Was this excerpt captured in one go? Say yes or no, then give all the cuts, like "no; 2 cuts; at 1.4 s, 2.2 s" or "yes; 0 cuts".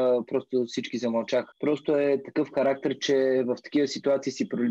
no; 1 cut; at 1.5 s